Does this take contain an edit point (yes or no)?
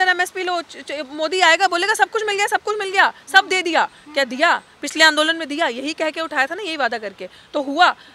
no